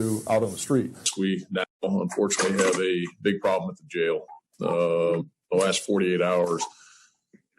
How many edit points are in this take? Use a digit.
2